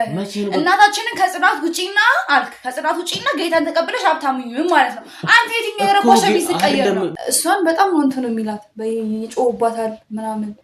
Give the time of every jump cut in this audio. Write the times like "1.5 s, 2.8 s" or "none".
7.2 s